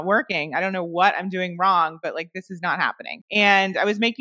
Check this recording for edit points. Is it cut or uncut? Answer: cut